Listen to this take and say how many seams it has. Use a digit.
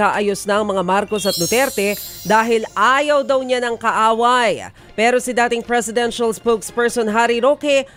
0